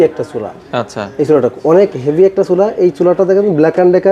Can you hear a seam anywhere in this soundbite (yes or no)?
no